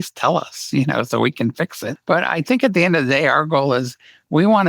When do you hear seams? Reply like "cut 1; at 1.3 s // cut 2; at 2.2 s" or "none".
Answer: cut 1; at 1.9 s